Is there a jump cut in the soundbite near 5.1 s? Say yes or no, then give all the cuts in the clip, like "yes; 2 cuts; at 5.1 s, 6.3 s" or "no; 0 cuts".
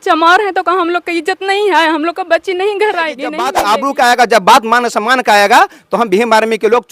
no; 1 cut; at 3.5 s